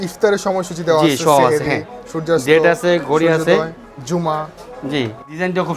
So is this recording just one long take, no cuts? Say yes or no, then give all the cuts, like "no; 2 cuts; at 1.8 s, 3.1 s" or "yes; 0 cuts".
yes; 0 cuts